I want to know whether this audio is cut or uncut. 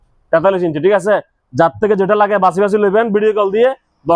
uncut